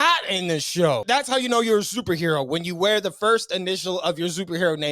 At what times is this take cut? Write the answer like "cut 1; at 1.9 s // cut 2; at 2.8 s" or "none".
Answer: cut 1; at 1.0 s